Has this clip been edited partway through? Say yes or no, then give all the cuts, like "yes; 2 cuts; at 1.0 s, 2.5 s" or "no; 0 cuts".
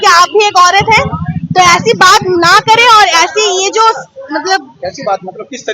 no; 0 cuts